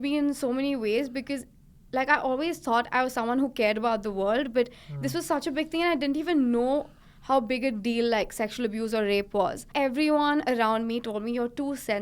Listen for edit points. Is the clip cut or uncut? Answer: cut